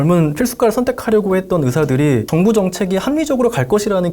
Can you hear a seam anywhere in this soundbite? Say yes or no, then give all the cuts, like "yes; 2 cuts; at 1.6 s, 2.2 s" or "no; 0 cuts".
yes; 1 cut; at 2.3 s